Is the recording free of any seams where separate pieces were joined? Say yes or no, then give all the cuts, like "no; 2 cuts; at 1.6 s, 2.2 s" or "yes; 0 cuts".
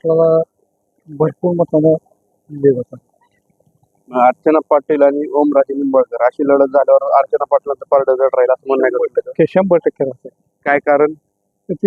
yes; 0 cuts